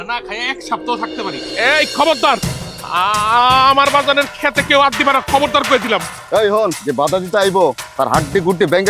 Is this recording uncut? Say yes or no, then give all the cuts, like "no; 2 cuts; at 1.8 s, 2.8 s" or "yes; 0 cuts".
no; 1 cut; at 1.5 s